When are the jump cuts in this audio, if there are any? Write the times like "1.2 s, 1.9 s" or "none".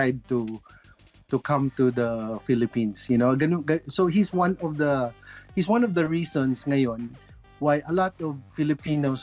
none